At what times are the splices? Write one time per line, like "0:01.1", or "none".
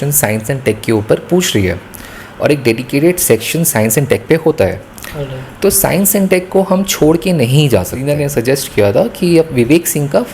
0:08.1